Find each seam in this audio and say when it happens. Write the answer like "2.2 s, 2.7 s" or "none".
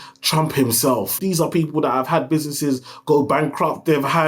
1.2 s